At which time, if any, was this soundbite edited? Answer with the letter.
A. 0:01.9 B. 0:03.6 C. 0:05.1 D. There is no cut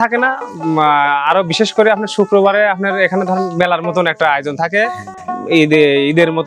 D